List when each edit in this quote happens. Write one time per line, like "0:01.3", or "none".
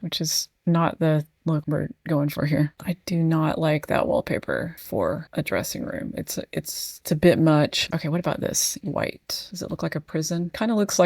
0:02.7
0:05.0
0:07.8